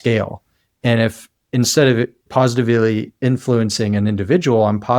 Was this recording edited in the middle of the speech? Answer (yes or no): yes